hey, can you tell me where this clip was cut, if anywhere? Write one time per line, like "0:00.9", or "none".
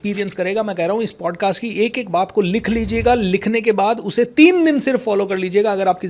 none